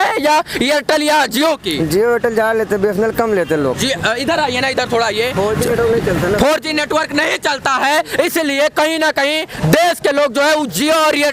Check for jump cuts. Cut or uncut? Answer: uncut